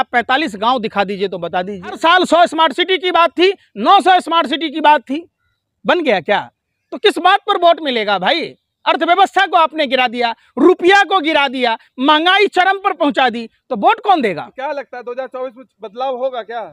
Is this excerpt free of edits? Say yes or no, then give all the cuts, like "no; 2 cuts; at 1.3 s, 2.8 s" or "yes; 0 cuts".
no; 1 cut; at 2.0 s